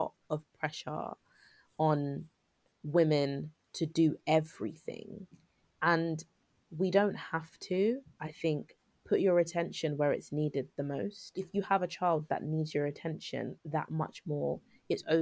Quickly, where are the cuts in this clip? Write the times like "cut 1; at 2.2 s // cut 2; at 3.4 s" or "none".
cut 1; at 11.4 s

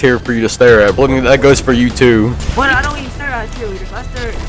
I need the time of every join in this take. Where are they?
cut 1; at 0.9 s // cut 2; at 2.4 s

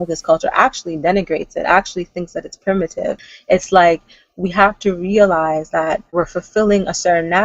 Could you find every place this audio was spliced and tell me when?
cut 1; at 3.3 s // cut 2; at 6.1 s

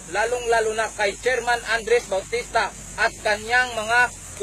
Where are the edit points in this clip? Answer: cut 1; at 3.4 s

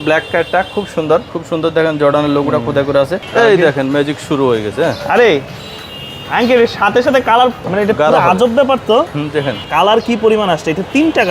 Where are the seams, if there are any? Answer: cut 1; at 1.3 s // cut 2; at 3.2 s // cut 3; at 7.6 s // cut 4; at 9.6 s

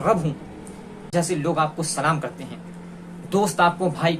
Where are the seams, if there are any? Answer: cut 1; at 1.1 s

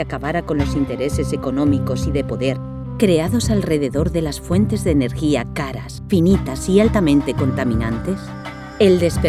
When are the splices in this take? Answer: none

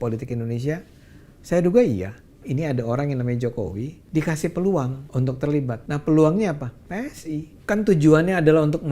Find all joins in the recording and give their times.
cut 1; at 2.4 s // cut 2; at 3.9 s // cut 3; at 5.0 s // cut 4; at 5.8 s // cut 5; at 7.5 s

